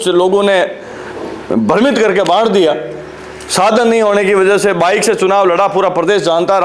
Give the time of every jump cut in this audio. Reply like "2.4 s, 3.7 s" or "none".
none